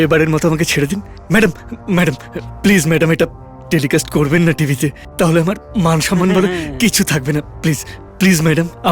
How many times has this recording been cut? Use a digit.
0